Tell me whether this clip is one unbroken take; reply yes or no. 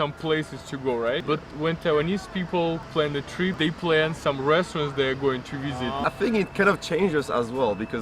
no